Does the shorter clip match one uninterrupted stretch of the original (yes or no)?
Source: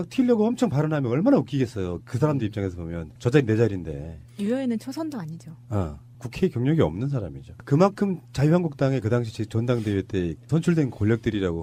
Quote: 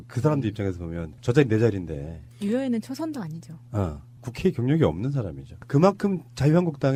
yes